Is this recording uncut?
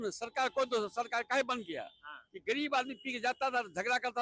yes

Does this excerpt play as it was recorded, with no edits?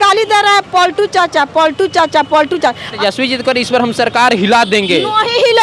no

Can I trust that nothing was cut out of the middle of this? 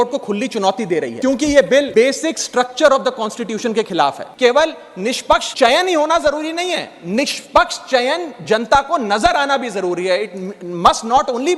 no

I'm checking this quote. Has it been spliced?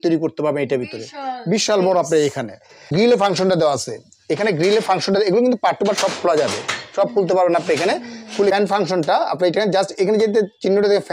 yes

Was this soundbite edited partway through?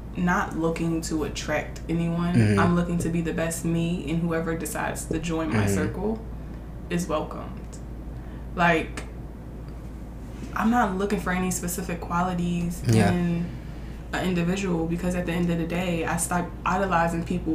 no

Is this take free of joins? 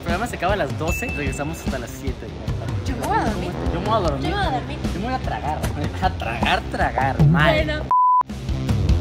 yes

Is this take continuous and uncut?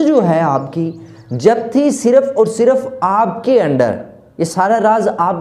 yes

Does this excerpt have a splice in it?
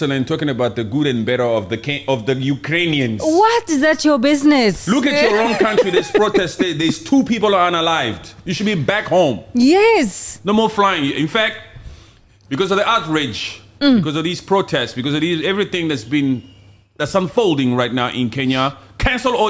no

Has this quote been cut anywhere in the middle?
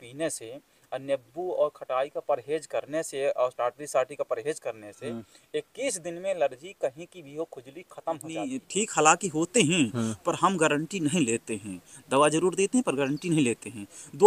yes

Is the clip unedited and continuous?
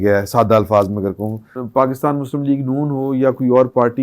no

